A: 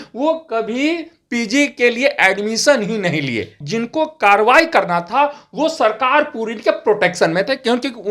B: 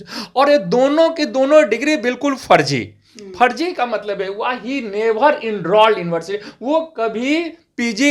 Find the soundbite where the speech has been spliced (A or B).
A